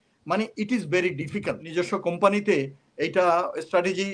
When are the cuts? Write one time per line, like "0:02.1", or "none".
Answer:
0:01.6